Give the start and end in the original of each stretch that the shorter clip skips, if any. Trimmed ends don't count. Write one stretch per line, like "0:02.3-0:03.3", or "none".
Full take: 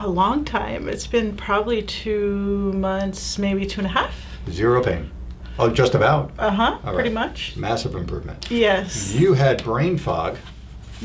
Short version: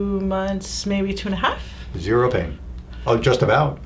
none

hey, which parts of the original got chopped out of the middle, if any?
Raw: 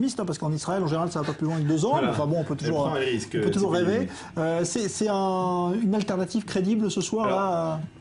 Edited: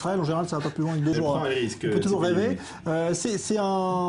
0:01.8-0:02.7

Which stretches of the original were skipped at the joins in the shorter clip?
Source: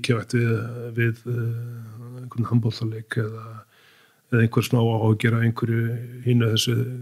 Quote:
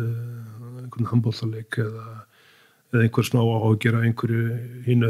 none

